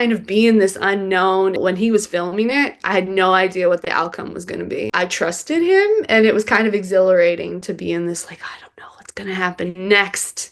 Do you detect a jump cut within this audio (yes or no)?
yes